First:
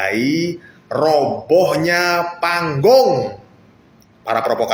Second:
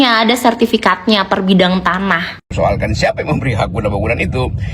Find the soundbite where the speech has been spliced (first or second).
second